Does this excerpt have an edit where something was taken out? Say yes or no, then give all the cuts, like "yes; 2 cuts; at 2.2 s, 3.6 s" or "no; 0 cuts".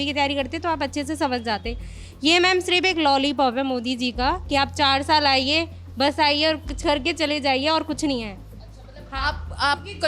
no; 0 cuts